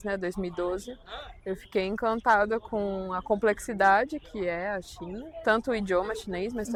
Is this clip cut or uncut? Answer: uncut